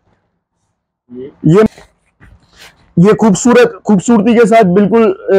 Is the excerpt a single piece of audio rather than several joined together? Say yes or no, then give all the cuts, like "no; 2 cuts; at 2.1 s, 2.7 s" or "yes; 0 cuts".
no; 1 cut; at 1.7 s